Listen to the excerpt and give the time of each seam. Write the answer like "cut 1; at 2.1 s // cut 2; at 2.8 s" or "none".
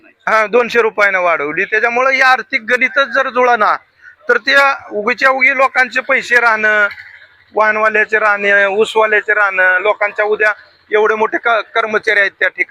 none